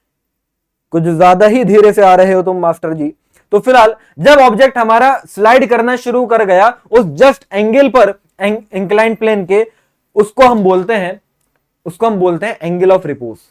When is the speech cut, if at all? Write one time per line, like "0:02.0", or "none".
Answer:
none